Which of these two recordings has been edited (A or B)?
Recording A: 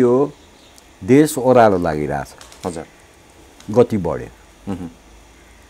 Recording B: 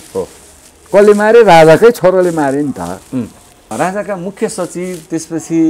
B